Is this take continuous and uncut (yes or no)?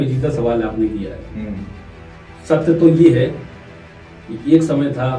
yes